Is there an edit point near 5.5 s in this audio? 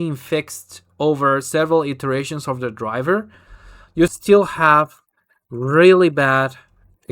no; 1 cut; at 4.1 s

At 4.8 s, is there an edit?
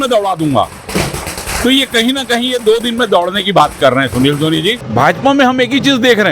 yes; 1 cut; at 4.8 s

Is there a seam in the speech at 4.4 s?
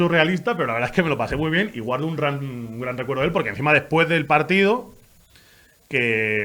no; 0 cuts

